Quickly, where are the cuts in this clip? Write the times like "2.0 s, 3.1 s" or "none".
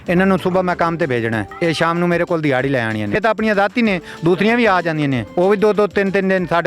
1.5 s, 3.2 s, 5.2 s